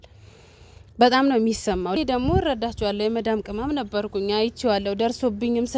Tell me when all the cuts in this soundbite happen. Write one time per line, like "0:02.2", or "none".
0:02.0